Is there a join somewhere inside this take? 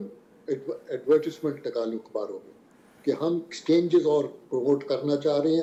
no; 0 cuts

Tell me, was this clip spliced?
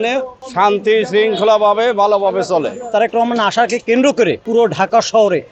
yes; 2 cuts; at 2.9 s, 4.4 s

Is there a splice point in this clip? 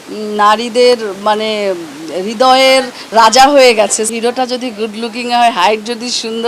yes; 1 cut; at 4.1 s

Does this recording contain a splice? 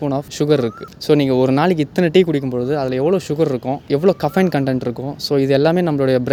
no; 0 cuts

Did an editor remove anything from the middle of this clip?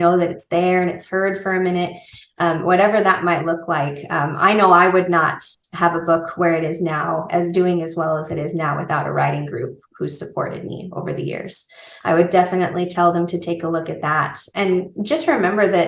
yes; 2 cuts; at 11.9 s, 14.4 s

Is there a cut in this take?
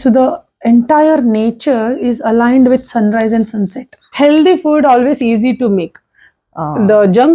yes; 1 cut; at 4.1 s

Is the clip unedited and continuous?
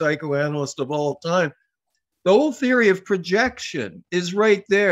yes; 0 cuts

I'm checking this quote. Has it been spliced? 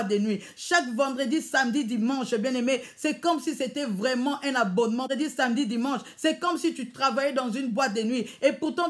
yes; 1 cut; at 5.1 s

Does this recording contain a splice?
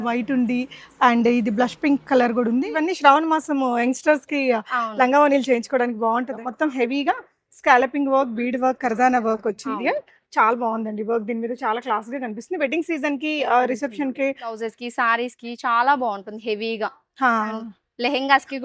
yes; 4 cuts; at 2.7 s, 6.4 s, 9.7 s, 14.6 s

